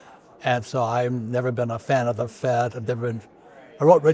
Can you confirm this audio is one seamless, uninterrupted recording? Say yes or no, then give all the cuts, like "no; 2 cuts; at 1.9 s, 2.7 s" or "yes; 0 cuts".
yes; 0 cuts